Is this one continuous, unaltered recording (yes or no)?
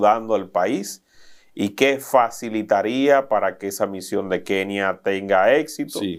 yes